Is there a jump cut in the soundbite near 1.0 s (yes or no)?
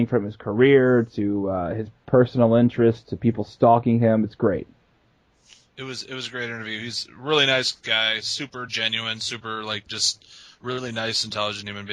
no